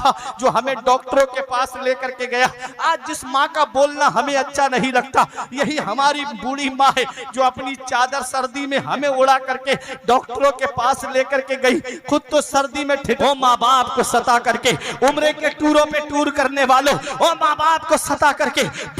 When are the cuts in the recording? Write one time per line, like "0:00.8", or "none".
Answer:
0:13.2